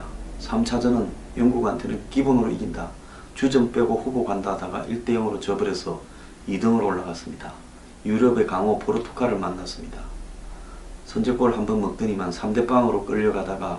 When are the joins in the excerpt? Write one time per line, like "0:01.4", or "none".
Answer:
none